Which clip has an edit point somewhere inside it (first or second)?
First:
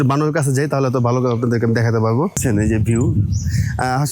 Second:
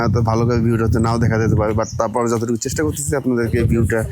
first